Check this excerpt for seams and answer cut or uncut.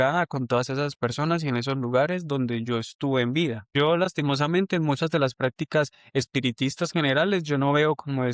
cut